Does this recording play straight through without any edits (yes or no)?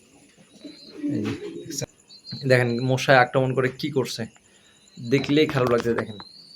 no